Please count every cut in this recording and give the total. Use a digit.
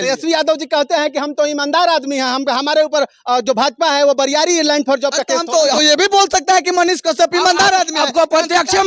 1